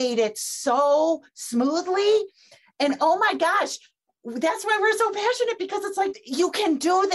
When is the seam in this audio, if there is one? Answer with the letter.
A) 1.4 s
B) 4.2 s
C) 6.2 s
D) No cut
C